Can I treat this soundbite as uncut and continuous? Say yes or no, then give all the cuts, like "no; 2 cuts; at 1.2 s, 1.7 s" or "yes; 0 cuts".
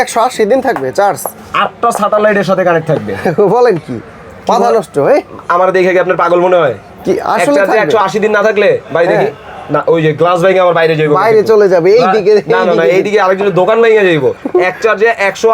yes; 0 cuts